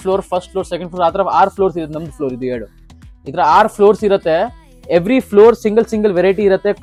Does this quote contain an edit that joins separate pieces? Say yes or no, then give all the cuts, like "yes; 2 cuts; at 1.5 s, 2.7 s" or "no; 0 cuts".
no; 0 cuts